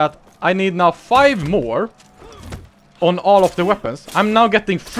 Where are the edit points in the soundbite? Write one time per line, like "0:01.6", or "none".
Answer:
none